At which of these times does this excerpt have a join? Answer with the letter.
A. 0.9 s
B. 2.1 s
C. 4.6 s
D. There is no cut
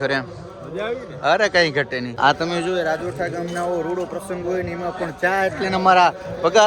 B